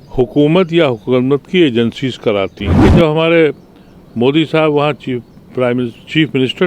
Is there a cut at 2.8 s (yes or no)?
yes